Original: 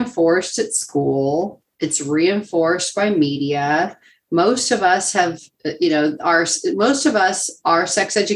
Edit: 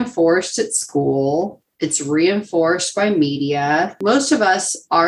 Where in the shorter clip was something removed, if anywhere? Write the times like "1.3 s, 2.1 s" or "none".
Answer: 4.0 s